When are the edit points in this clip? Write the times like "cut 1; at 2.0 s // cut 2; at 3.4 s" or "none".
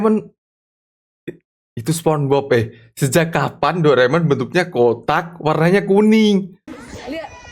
cut 1; at 6.6 s